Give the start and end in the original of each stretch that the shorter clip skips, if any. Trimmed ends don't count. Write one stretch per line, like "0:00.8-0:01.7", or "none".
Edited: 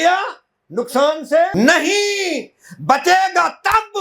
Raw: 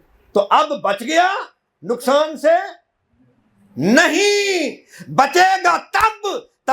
0:02.6-0:03.8

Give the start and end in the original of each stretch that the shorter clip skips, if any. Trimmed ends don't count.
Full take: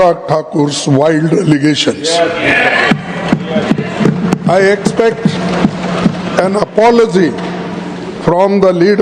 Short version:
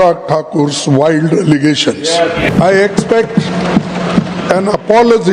0:02.5-0:04.4

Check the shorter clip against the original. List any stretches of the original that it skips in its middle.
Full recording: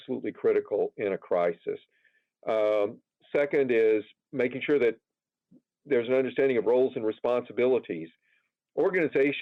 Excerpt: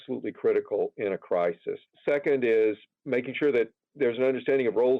0:01.8-0:03.1
0:05.1-0:05.7

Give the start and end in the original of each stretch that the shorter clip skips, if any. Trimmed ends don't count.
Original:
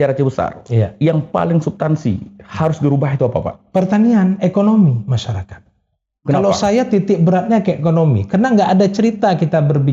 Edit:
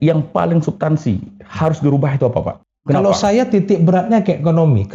0:03.6-0:06.0

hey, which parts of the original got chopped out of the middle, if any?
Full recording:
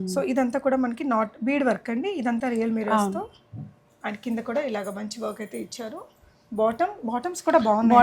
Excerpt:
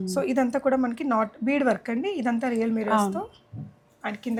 none

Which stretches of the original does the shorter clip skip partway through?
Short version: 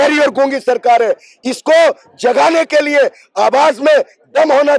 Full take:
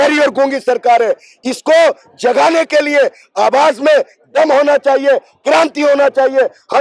none

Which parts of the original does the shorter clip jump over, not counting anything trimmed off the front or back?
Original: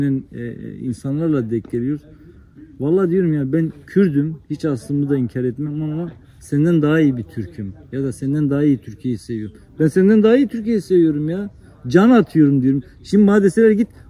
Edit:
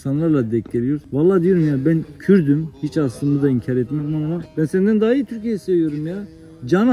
0:02.0-0:02.7
0:06.1-0:09.7

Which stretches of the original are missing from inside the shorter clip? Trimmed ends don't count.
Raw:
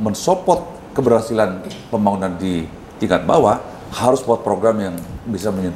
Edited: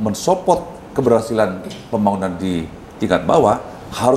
none

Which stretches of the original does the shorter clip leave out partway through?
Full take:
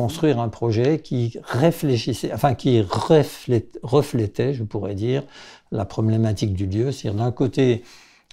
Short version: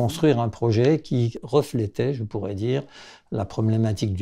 0:01.4-0:03.8

